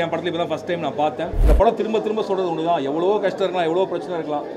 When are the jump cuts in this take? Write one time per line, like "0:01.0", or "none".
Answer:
0:01.4